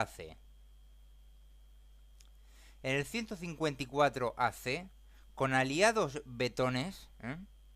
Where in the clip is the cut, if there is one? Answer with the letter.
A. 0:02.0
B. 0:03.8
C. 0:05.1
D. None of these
B